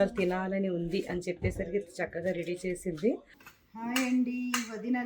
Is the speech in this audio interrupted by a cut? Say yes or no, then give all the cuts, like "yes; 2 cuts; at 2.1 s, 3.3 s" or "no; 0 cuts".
no; 0 cuts